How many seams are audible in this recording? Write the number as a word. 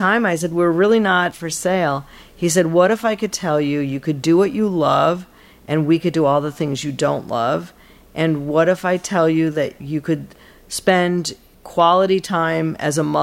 one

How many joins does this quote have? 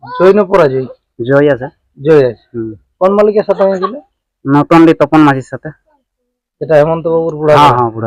zero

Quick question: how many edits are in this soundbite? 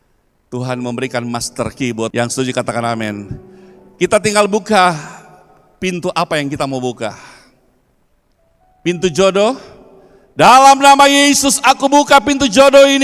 one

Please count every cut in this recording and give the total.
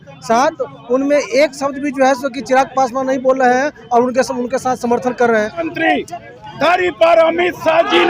one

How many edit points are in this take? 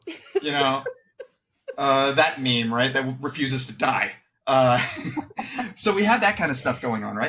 zero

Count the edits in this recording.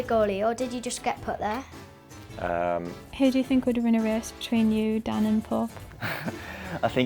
one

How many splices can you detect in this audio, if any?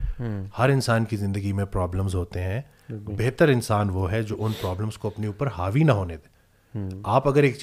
zero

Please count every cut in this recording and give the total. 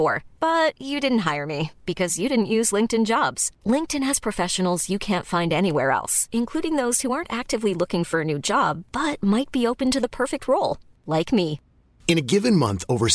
zero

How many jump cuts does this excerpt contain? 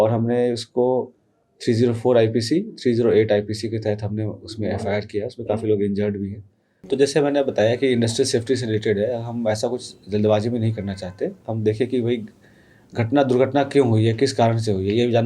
one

